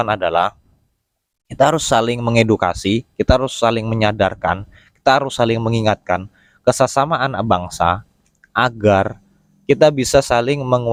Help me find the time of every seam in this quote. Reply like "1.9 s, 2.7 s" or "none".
none